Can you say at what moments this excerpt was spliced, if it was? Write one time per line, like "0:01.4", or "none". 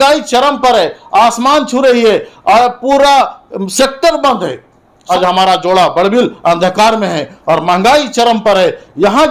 0:05.0

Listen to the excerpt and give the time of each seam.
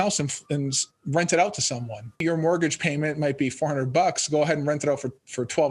0:02.2

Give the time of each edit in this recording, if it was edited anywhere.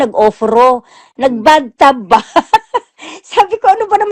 none

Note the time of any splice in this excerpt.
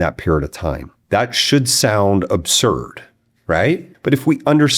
0:00.9
0:03.9

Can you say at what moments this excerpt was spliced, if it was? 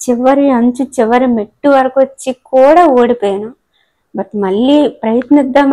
none

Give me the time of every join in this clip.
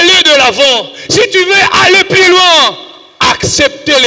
none

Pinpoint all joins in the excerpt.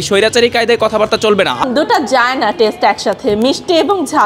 0:01.6

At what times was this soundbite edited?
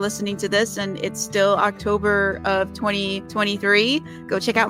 0:03.2

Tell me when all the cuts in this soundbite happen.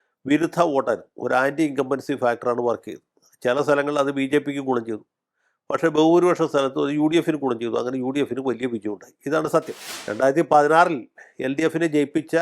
0:09.8

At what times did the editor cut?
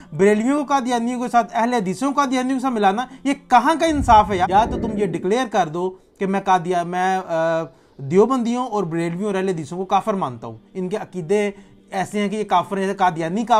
0:04.4

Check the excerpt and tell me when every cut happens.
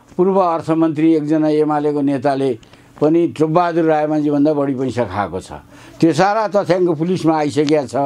none

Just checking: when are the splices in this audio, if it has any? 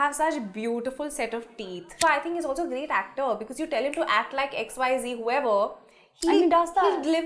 0:02.0

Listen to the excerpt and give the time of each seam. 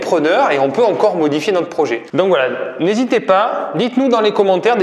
none

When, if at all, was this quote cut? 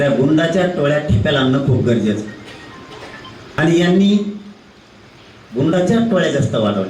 0:03.6

